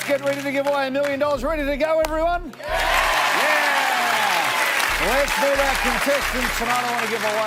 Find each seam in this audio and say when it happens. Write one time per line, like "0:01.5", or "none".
none

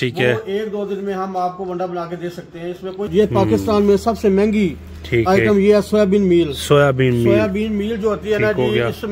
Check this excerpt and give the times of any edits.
0:03.1

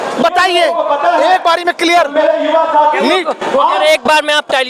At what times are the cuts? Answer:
none

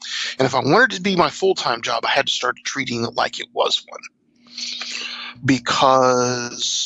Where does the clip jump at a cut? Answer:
0:05.3

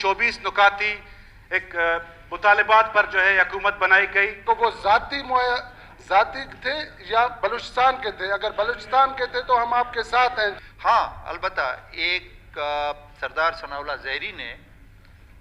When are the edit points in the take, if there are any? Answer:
0:04.4
0:10.6

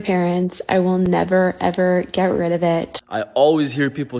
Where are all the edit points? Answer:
0:02.9

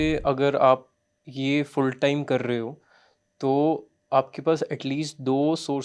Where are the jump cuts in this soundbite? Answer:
none

